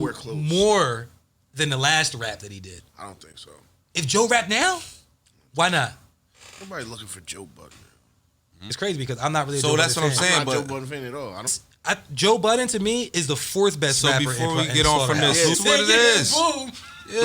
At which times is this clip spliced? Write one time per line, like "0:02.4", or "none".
0:08.6
0:11.6
0:15.6